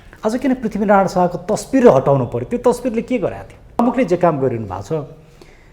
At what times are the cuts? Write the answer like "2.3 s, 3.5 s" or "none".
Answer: 3.8 s